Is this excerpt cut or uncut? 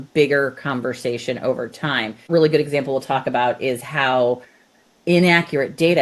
cut